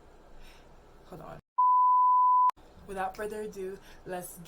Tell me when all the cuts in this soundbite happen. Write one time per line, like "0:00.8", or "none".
0:01.5
0:02.5